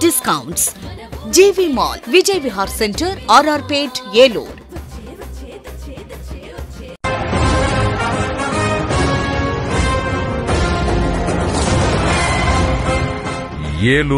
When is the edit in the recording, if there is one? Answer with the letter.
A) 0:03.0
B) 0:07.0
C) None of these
B